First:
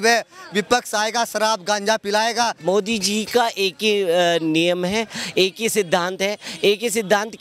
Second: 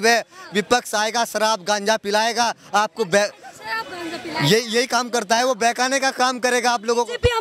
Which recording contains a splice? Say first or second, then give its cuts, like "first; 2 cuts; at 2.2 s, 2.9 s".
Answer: first; 1 cut; at 2.6 s